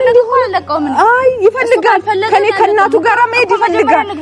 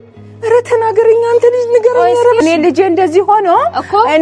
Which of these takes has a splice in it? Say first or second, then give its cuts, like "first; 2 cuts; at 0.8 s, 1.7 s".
second; 1 cut; at 2.4 s